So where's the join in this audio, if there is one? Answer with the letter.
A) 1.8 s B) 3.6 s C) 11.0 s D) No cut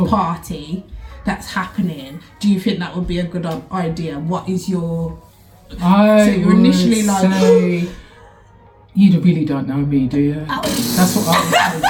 D